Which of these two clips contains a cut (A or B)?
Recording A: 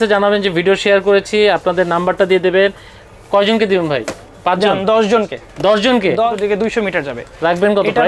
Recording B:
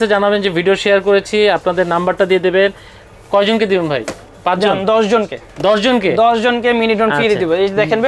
A